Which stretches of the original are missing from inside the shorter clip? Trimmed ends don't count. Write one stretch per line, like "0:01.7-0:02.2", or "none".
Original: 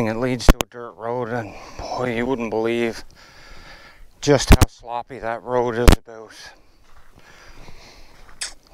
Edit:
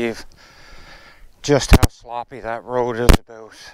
none